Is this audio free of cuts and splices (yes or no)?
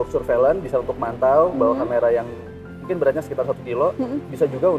yes